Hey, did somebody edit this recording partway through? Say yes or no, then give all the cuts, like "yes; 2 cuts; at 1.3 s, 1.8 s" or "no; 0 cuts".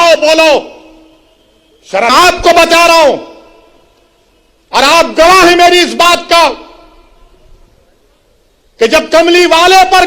yes; 1 cut; at 2.1 s